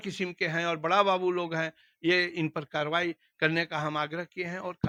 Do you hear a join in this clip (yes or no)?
no